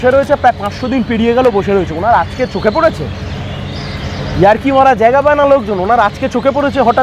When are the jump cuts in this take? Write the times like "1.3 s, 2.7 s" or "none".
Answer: none